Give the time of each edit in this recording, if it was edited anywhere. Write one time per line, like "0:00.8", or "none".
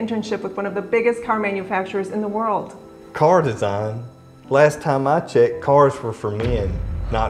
none